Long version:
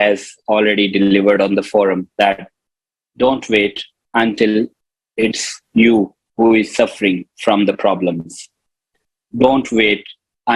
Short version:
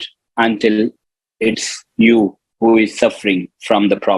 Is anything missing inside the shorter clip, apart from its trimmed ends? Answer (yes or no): no